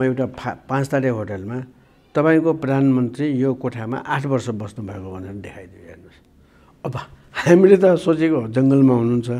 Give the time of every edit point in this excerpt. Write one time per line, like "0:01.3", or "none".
none